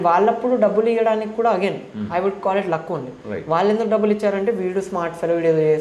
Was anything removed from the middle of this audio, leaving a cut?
no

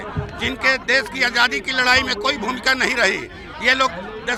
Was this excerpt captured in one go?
yes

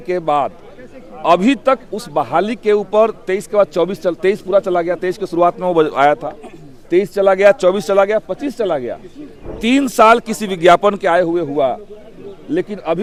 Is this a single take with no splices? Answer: yes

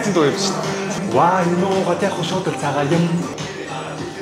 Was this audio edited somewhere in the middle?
yes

